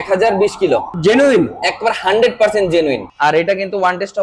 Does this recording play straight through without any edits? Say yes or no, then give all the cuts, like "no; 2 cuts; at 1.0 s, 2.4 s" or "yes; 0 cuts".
no; 2 cuts; at 0.9 s, 3.1 s